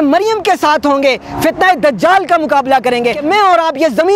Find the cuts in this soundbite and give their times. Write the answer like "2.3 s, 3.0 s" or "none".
3.2 s